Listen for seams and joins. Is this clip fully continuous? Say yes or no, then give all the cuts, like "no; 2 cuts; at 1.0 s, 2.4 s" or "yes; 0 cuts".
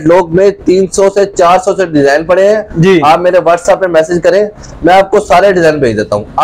yes; 0 cuts